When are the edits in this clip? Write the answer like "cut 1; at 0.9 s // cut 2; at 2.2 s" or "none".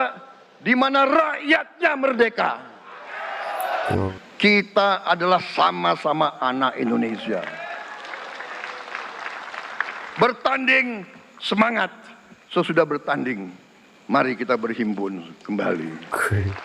cut 1; at 3.9 s